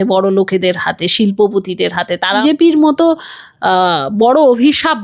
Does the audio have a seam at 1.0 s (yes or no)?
no